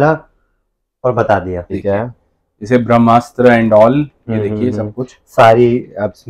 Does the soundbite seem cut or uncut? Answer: cut